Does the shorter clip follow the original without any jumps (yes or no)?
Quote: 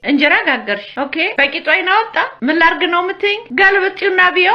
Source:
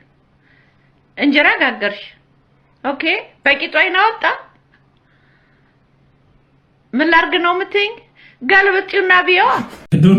no